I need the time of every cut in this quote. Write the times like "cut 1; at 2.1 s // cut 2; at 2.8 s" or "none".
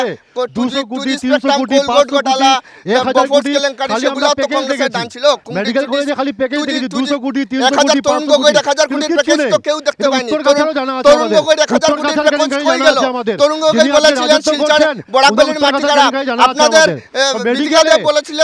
none